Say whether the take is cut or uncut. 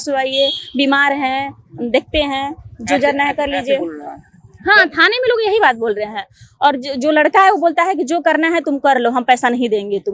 uncut